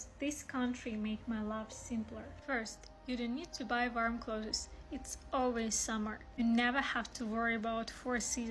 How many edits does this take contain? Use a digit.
0